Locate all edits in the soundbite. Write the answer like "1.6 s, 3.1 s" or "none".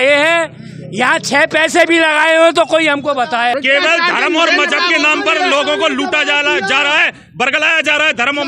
3.5 s